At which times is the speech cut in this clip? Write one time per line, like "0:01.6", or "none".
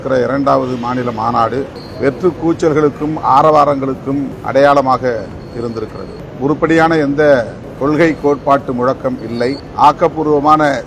0:01.8
0:04.4
0:06.2
0:07.6
0:09.6